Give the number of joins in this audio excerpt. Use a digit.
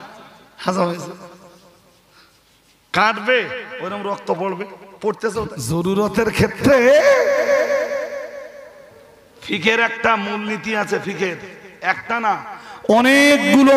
1